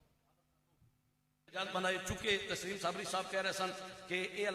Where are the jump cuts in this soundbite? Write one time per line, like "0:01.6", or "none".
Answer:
0:01.6